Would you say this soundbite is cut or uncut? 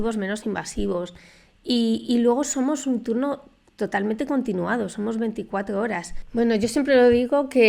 cut